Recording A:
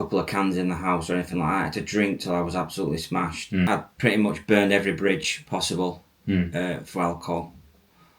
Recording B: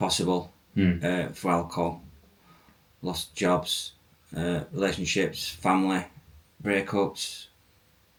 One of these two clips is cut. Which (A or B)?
A